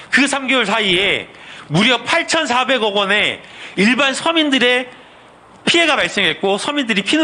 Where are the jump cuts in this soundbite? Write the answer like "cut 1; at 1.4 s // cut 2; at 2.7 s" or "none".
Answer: none